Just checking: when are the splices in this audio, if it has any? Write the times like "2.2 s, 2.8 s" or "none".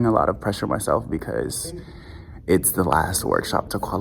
none